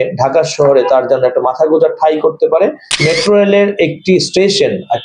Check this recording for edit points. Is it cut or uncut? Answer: cut